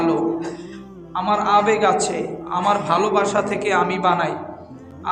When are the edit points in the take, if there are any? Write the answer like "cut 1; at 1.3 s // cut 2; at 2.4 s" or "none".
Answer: none